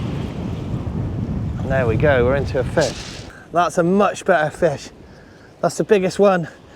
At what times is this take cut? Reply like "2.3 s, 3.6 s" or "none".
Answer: 3.3 s